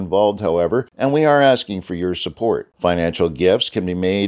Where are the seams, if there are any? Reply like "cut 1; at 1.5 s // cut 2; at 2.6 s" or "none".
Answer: cut 1; at 0.9 s